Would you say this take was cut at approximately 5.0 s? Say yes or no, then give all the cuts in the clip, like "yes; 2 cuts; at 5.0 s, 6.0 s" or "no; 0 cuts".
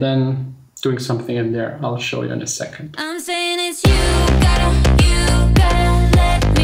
no; 1 cut; at 3.1 s